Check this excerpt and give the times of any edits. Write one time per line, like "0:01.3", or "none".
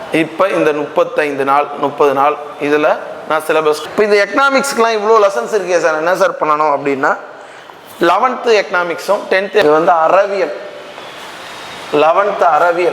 0:03.8
0:09.6